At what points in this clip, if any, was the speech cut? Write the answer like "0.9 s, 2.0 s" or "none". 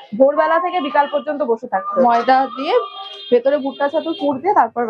2.0 s